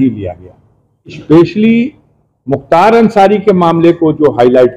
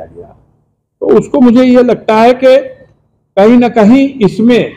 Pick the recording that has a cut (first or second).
first